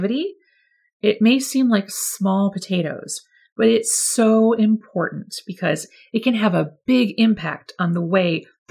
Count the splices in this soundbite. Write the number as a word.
zero